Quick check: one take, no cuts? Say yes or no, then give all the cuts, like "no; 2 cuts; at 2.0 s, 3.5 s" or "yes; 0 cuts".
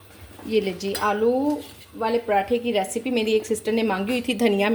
yes; 0 cuts